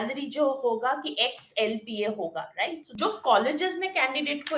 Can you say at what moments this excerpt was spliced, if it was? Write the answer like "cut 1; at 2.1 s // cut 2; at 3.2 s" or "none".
cut 1; at 2.9 s